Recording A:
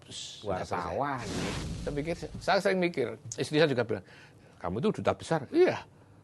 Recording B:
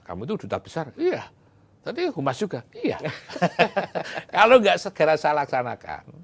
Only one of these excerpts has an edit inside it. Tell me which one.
A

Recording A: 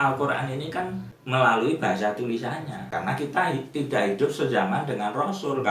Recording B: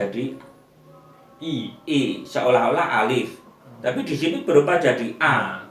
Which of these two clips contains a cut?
A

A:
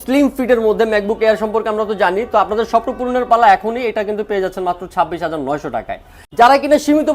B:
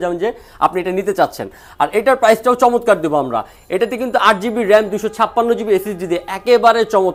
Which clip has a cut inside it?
A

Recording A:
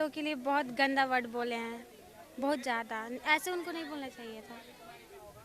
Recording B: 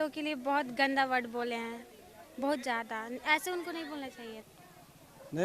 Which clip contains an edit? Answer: B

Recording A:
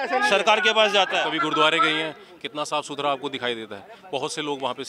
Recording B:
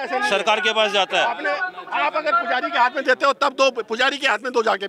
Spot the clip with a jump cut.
A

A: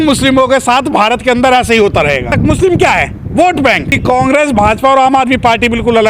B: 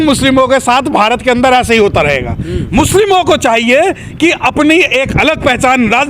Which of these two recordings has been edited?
A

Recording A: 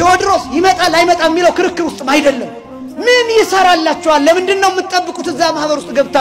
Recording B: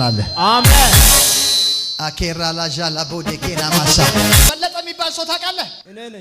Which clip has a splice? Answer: B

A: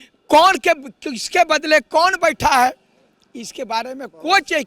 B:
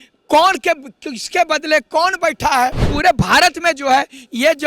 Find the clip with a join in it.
B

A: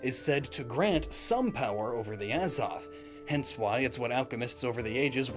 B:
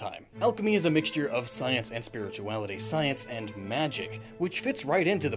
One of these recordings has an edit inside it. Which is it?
A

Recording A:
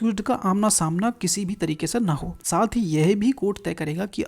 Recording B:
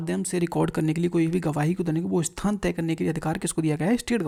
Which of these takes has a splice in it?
A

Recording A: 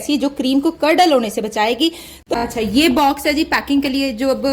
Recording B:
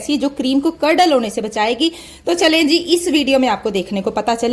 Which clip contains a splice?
A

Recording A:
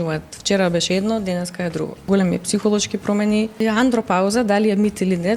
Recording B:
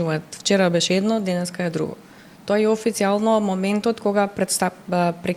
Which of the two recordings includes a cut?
A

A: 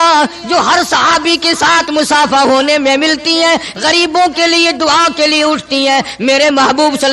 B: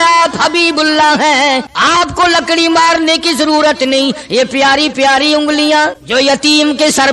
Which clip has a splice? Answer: B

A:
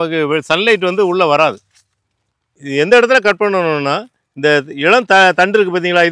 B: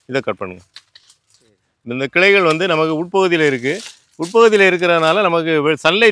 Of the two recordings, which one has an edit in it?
A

